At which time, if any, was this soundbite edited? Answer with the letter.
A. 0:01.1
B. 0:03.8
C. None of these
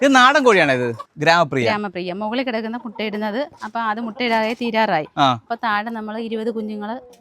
A